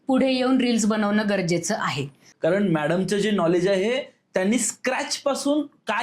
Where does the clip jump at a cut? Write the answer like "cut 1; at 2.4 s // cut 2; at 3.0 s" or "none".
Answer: cut 1; at 2.3 s